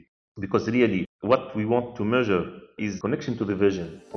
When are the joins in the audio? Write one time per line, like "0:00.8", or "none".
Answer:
0:03.0